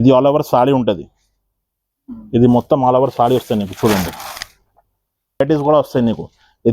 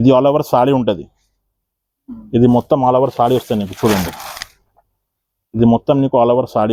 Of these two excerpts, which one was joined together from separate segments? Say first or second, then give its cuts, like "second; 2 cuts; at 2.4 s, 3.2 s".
first; 1 cut; at 5.4 s